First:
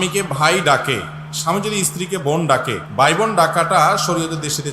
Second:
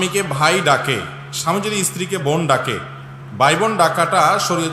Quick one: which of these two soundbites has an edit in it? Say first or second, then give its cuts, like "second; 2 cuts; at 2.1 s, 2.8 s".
first; 1 cut; at 2.8 s